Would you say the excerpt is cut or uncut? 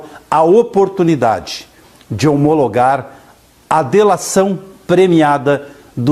cut